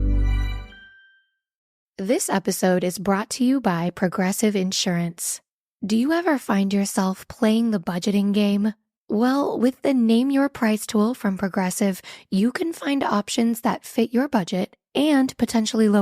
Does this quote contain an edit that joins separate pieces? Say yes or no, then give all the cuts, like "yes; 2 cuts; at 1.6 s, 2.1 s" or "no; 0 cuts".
yes; 1 cut; at 1.8 s